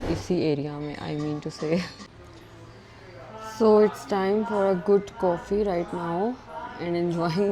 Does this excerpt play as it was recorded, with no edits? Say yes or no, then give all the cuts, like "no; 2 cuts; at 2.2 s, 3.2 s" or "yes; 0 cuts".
no; 1 cut; at 2.1 s